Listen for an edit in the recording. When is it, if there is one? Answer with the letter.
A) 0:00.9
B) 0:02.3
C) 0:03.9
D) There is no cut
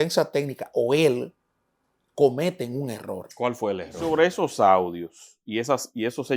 C